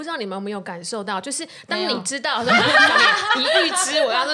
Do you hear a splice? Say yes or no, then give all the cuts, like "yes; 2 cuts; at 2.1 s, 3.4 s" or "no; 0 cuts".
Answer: no; 0 cuts